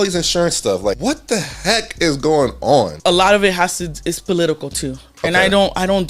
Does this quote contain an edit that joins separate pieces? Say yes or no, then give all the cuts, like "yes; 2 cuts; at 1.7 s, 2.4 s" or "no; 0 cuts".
yes; 2 cuts; at 1.0 s, 2.9 s